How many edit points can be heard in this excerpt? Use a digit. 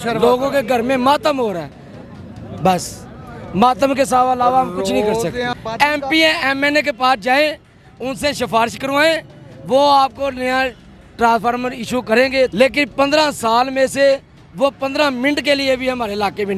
2